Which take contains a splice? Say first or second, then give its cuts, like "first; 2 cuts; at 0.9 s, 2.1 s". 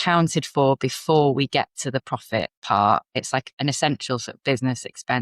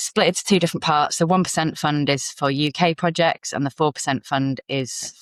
first; 2 cuts; at 2.6 s, 3.3 s